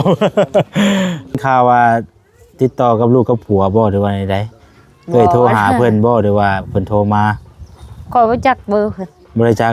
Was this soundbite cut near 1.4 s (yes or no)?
yes